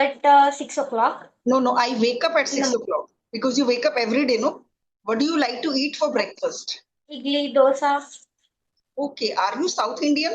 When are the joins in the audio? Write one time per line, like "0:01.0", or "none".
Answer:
0:04.9
0:07.1

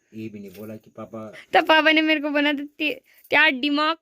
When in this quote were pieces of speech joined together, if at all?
0:01.5

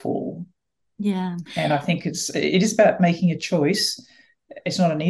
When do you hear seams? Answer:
none

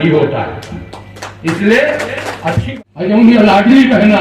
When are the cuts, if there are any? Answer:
0:02.6

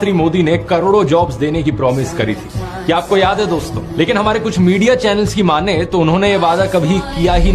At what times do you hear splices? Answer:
0:02.7

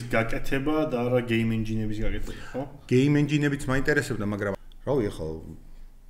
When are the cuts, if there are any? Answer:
0:04.5

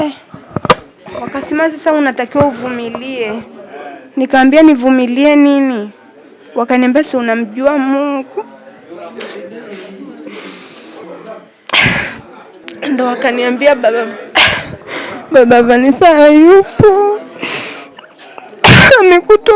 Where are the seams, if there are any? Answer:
0:01.0

